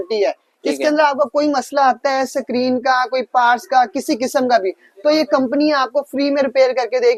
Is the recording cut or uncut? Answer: uncut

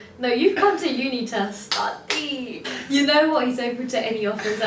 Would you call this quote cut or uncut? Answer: cut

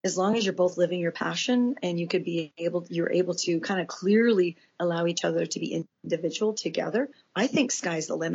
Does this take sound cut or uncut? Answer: uncut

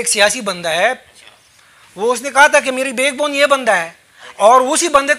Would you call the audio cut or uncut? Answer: uncut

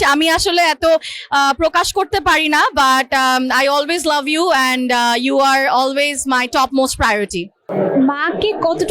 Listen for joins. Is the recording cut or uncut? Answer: cut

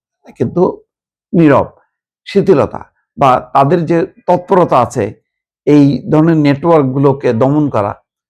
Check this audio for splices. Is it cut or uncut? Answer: uncut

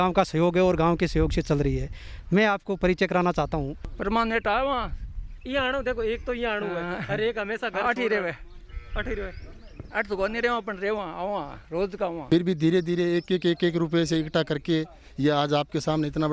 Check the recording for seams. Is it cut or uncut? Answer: cut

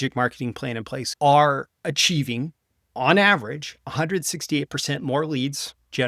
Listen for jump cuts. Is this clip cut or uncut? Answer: cut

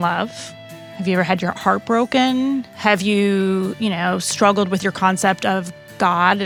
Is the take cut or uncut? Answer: uncut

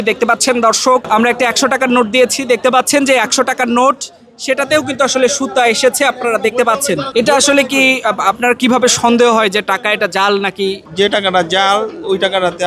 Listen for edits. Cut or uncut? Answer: cut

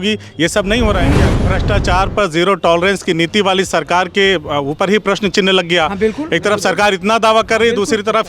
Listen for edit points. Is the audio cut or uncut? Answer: cut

